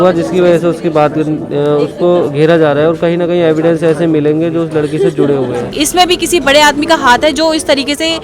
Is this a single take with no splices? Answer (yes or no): no